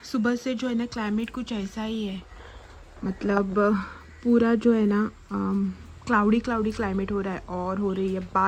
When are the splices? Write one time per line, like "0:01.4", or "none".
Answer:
none